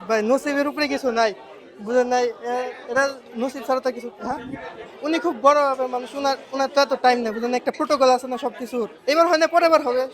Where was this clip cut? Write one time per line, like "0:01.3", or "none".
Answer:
0:04.9
0:08.9